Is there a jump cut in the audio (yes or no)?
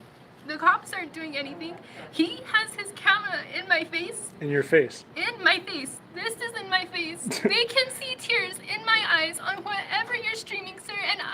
yes